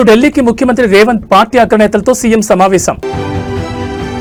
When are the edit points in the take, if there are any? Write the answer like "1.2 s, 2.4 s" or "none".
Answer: none